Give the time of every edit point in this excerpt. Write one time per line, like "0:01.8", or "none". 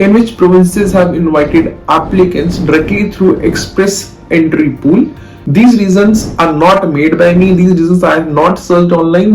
0:05.4